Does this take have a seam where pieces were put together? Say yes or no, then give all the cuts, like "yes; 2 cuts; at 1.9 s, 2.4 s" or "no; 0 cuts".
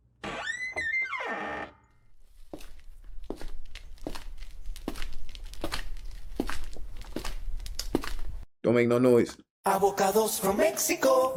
no; 0 cuts